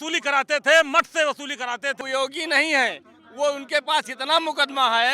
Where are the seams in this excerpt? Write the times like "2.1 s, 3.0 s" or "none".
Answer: 2.0 s